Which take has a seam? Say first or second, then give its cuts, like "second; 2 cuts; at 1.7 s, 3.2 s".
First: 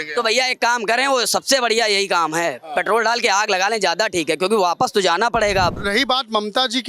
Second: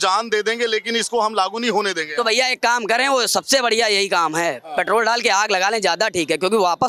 first; 1 cut; at 5.8 s